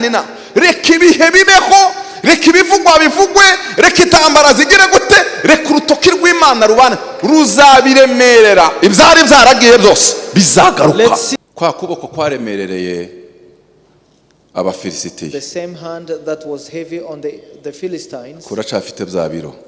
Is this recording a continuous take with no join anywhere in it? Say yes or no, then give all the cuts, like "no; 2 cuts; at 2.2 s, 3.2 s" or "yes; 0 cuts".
no; 1 cut; at 11.3 s